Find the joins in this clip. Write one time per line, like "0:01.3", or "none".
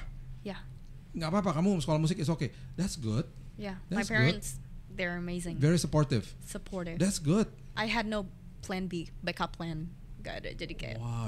0:07.6